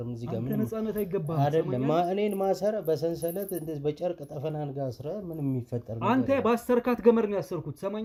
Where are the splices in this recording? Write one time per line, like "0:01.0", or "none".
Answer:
none